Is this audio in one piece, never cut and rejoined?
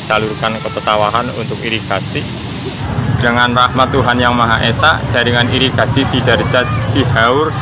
no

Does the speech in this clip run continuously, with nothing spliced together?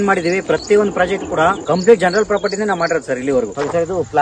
yes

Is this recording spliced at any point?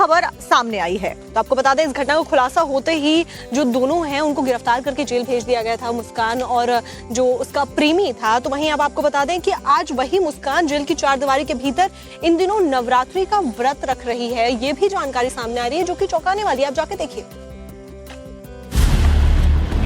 yes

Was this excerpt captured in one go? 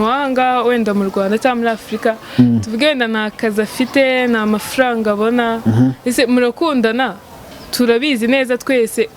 yes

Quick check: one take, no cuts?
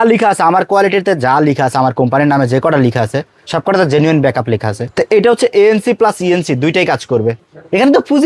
no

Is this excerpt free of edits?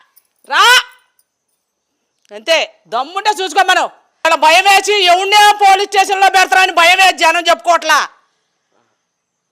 no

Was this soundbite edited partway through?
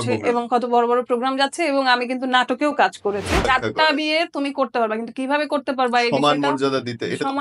yes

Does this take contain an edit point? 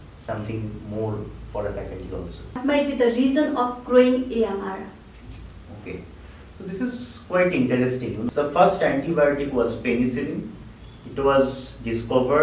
yes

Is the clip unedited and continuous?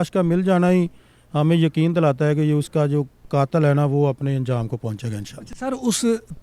yes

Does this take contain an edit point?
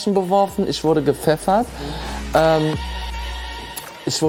no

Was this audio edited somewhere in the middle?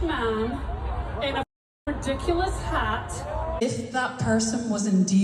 yes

